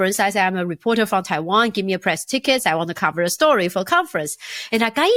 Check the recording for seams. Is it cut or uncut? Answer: uncut